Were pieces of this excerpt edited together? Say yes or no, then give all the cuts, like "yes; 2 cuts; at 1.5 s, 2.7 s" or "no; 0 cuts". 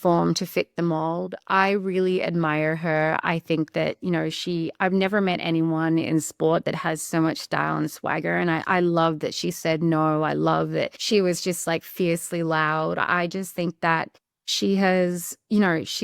yes; 1 cut; at 11.0 s